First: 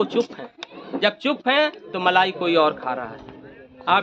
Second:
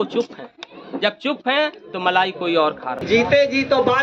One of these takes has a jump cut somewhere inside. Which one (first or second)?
second